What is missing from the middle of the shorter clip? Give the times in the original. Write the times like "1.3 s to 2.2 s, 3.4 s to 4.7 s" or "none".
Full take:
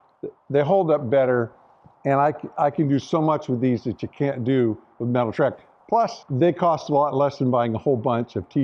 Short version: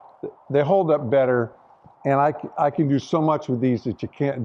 none